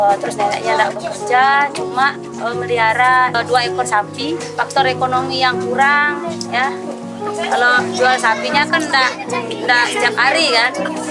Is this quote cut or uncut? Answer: cut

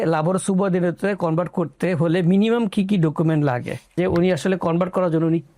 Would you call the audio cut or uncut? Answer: cut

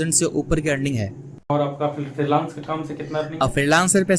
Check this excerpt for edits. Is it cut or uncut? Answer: cut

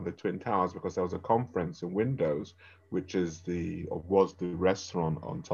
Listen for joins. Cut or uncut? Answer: uncut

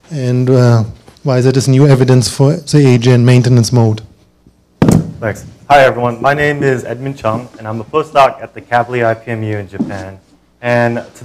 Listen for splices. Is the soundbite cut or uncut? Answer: cut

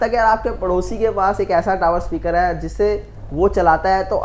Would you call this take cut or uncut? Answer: uncut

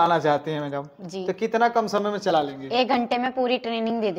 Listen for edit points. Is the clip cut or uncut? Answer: uncut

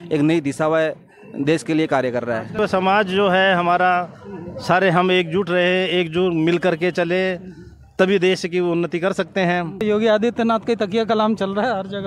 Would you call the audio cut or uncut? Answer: cut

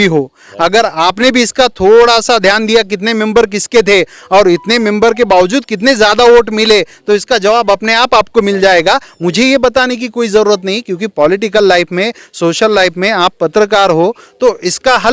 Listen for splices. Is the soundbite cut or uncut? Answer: uncut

